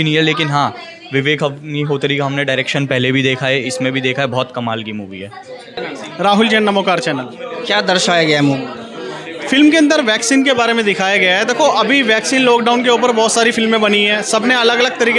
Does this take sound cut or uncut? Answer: uncut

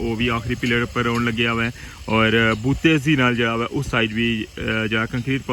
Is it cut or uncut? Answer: uncut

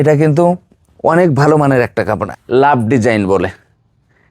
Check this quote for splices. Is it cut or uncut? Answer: cut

